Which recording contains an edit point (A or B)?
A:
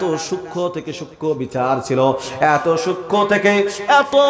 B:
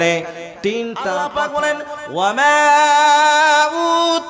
B